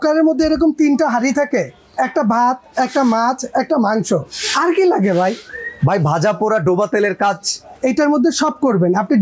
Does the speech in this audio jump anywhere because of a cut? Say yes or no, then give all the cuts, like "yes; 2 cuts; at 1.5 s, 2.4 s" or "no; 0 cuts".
no; 0 cuts